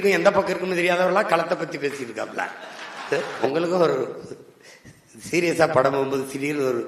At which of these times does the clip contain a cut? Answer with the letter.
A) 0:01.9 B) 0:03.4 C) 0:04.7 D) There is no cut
B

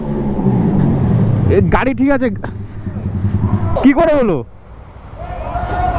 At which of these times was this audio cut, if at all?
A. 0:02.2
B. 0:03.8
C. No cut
B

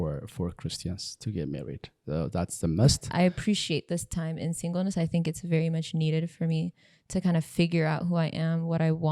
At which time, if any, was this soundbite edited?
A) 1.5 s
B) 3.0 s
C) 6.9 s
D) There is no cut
B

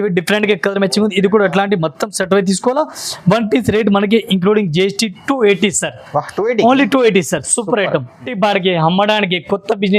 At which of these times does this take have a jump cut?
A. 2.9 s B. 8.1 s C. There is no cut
B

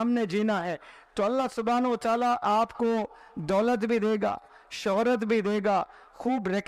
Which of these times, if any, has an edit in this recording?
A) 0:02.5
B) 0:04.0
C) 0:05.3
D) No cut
D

